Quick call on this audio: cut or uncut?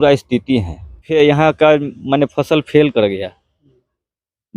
cut